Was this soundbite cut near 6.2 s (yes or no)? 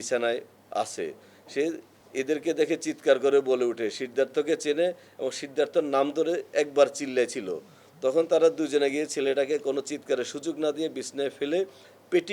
no